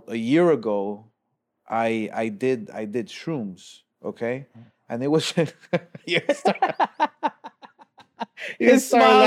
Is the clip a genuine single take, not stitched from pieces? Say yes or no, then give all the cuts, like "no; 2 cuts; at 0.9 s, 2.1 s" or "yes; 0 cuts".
yes; 0 cuts